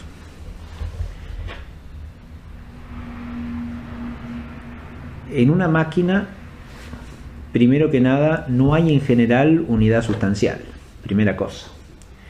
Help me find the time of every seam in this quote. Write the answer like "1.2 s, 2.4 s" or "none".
none